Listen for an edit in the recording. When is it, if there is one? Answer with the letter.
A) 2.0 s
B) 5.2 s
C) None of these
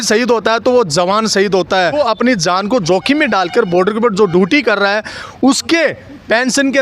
A